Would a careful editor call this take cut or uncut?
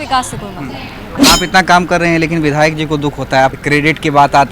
cut